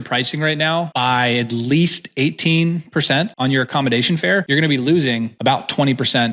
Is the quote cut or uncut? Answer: cut